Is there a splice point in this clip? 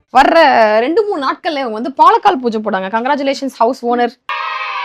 no; 0 cuts

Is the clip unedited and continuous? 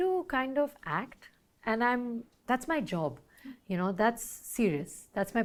yes; 0 cuts

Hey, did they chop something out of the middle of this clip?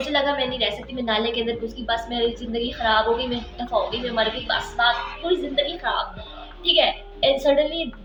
no; 0 cuts

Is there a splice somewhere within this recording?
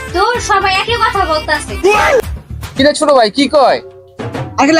yes; 1 cut; at 2.2 s

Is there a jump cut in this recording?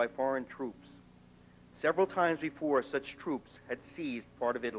yes; 1 cut; at 2.6 s

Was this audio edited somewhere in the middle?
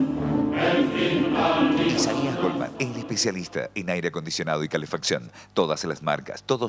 yes; 1 cut; at 1.9 s

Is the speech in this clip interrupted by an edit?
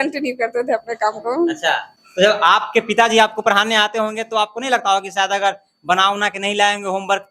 yes; 1 cut; at 1.9 s

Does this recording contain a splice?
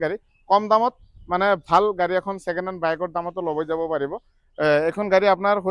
no; 0 cuts

